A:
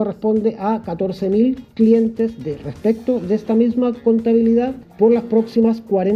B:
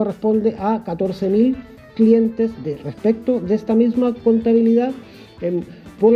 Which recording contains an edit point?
A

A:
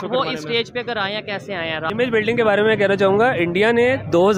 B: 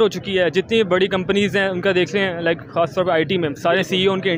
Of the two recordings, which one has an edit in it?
A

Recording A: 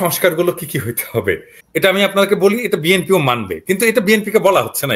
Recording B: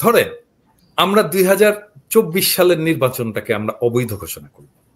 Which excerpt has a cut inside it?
A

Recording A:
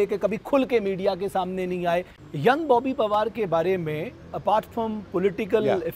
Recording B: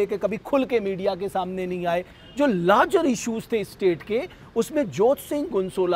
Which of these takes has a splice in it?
A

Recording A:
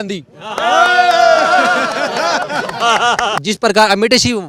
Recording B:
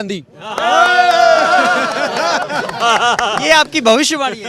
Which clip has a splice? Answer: A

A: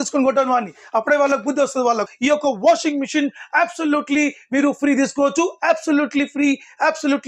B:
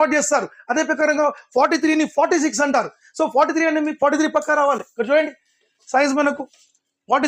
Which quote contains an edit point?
A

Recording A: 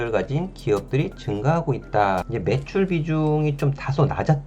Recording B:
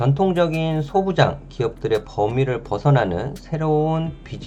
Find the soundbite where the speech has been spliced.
A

